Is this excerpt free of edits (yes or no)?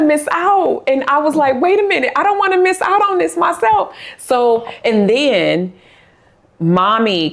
yes